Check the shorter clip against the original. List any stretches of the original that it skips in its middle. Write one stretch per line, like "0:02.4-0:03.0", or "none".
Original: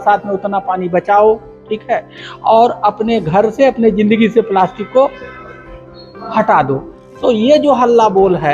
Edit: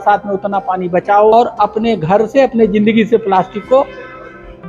0:01.3-0:02.6